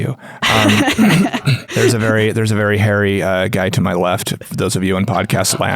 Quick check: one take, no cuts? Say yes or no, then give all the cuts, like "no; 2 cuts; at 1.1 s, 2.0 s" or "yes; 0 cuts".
no; 1 cut; at 1.6 s